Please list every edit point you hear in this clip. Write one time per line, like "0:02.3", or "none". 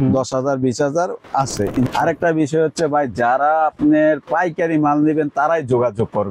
0:01.9